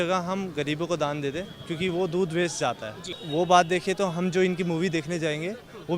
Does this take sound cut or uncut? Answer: cut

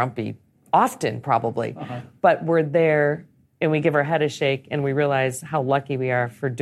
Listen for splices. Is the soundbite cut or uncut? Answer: uncut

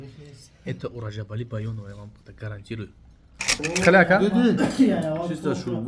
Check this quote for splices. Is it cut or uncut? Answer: cut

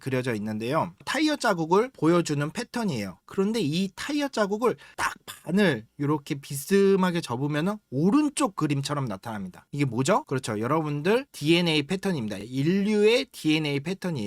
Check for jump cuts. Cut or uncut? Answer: cut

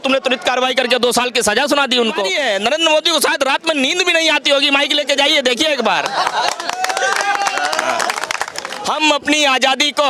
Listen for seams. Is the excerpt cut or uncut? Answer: cut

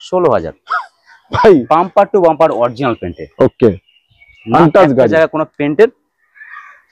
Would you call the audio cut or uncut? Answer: uncut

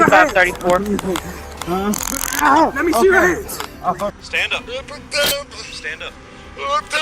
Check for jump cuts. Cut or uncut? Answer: cut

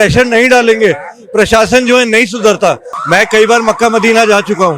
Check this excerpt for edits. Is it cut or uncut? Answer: cut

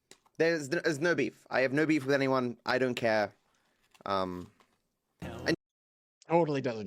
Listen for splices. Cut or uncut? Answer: cut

